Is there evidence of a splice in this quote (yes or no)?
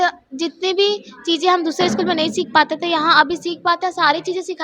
no